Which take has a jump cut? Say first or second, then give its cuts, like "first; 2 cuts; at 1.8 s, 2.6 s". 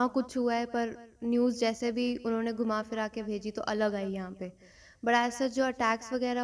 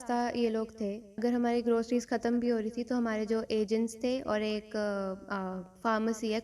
second; 1 cut; at 1.2 s